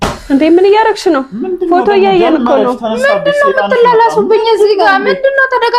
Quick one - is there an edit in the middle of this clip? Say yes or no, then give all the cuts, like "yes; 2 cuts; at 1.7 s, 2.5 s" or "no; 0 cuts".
no; 0 cuts